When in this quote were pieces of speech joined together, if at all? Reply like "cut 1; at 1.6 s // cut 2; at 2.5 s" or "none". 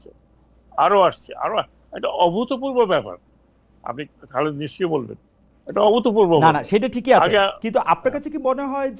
none